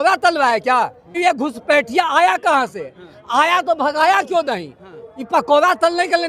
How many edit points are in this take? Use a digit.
1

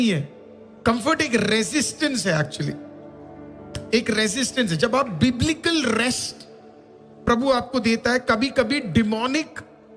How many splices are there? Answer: 0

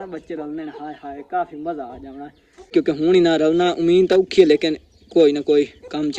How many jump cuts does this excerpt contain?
1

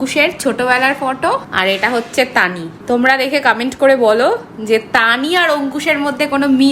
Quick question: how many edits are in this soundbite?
2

